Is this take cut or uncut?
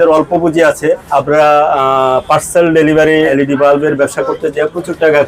cut